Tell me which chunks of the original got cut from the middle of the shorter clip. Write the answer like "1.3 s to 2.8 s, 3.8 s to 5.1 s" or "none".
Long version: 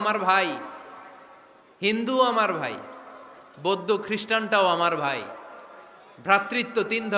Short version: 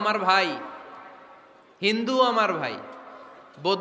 none